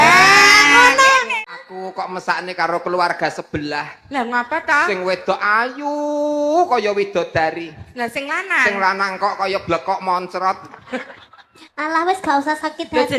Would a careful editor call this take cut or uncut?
cut